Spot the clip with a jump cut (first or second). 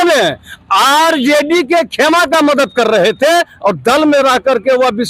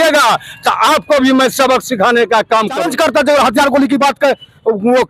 second